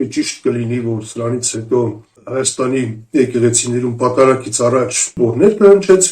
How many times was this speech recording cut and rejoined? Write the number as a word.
two